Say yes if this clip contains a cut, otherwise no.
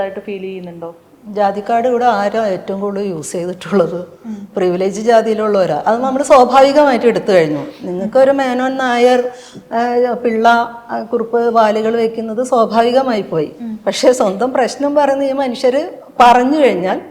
no